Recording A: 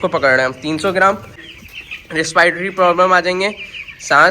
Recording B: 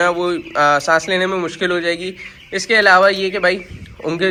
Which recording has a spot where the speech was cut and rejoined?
A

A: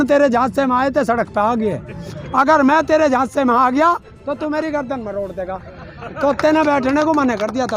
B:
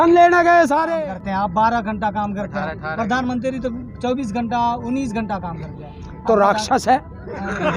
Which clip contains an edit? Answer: B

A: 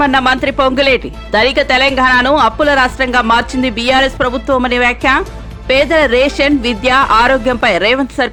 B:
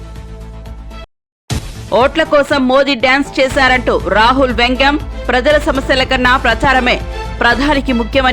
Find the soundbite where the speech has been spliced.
B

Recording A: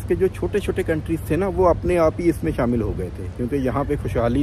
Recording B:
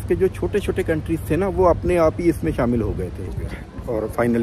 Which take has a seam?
B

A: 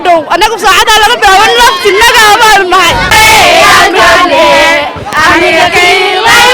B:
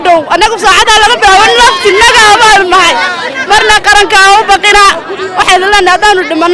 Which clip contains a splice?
A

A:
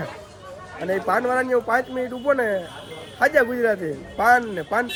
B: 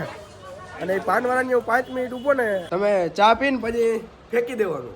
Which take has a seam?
B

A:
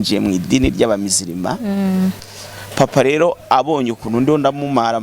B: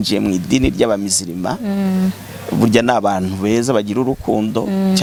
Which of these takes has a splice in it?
A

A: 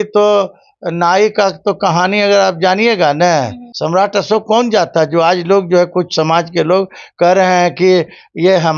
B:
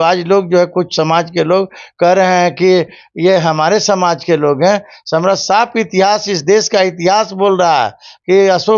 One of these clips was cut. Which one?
A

